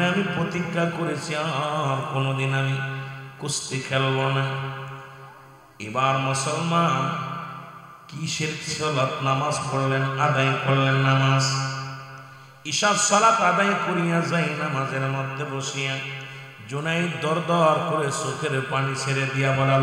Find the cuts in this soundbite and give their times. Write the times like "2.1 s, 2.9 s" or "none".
none